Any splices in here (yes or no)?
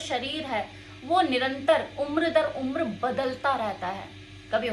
no